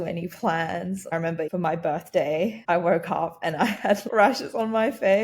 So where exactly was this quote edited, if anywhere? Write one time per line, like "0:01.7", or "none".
0:01.1
0:02.6
0:04.0